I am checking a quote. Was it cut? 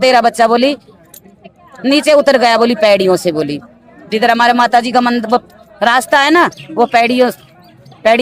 no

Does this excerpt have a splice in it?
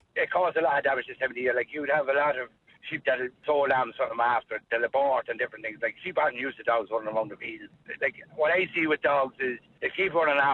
no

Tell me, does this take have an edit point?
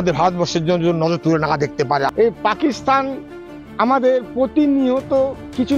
yes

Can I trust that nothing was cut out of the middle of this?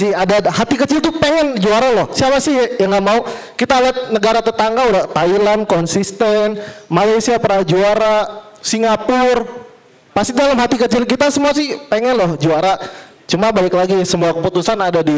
yes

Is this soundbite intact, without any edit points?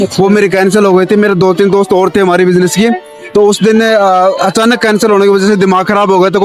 yes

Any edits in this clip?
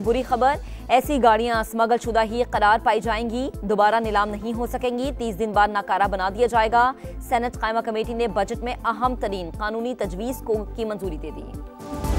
no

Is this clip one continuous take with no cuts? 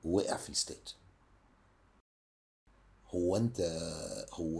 no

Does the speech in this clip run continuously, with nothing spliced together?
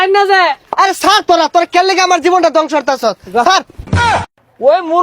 no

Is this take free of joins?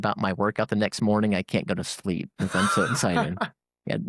yes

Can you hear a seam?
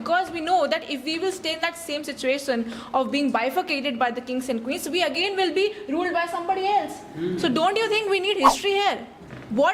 no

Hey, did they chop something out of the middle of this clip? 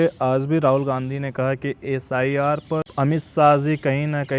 yes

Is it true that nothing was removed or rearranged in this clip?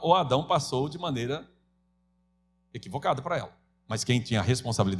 yes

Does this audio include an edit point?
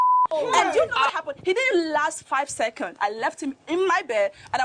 yes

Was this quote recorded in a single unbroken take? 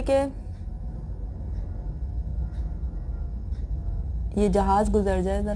yes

